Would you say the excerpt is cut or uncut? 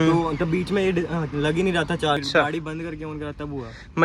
cut